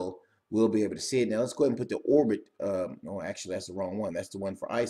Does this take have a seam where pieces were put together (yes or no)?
yes